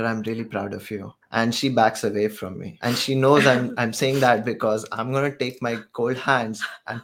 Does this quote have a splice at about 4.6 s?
no; 2 cuts; at 1.2 s, 2.7 s

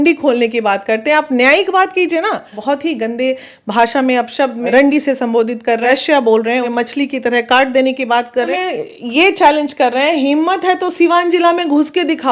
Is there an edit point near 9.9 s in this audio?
no; 5 cuts; at 2.5 s, 4.6 s, 5.8 s, 6.7 s, 8.5 s

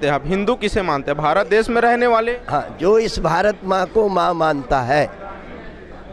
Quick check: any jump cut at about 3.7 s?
no; 0 cuts

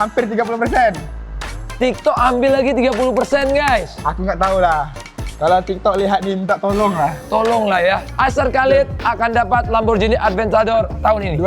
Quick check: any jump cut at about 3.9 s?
no; 1 cut; at 8.1 s

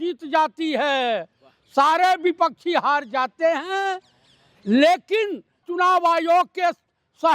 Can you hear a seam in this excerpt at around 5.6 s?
yes; 1 cut; at 5.6 s

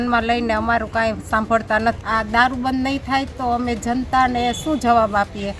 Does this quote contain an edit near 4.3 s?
no; 1 cut; at 2.0 s

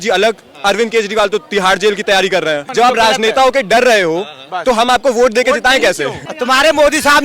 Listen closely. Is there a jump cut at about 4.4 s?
no; 2 cuts; at 2.7 s, 6.2 s

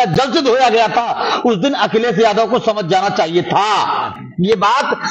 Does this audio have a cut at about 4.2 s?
yes; 1 cut; at 4.2 s

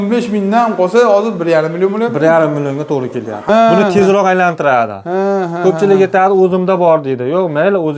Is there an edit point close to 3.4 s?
yes; 1 cut; at 3.4 s

